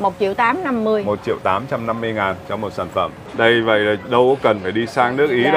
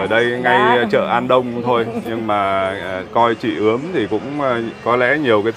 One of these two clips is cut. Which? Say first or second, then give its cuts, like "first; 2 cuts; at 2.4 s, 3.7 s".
first; 1 cut; at 3.2 s